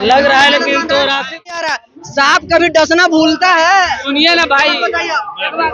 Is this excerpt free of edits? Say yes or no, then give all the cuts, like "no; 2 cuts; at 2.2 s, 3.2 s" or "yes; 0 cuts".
no; 1 cut; at 1.8 s